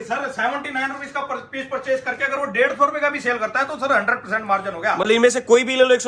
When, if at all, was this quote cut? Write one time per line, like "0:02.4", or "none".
0:05.1